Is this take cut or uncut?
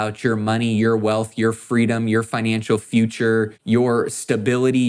cut